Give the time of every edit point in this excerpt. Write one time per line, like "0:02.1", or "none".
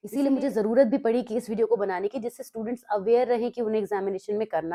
none